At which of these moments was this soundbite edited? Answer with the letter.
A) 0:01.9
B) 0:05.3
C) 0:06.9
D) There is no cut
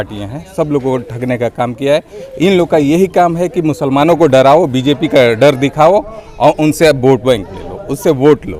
D